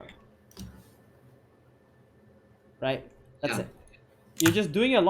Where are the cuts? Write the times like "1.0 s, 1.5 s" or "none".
none